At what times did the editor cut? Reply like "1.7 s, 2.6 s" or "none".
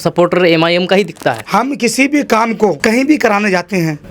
1.4 s